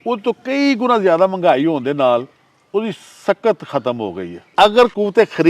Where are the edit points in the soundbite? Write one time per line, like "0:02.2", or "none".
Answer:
0:04.3